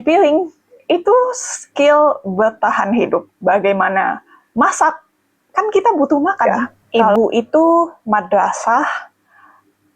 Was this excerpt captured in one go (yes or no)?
no